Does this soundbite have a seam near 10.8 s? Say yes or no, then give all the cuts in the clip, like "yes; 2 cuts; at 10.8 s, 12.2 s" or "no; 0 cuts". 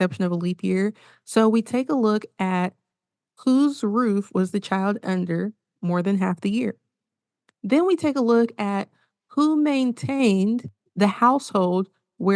yes; 1 cut; at 10.8 s